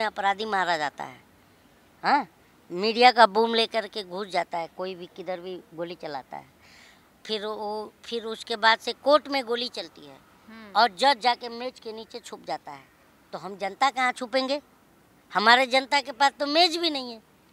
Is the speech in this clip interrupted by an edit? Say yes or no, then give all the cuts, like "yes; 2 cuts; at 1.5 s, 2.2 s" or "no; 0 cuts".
no; 0 cuts